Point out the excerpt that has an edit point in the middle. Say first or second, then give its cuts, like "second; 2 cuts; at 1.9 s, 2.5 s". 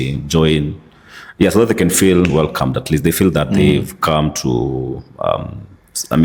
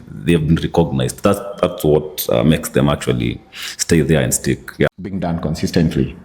second; 1 cut; at 5.2 s